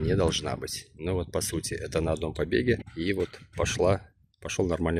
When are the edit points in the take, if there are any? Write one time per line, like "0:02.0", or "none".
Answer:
0:02.9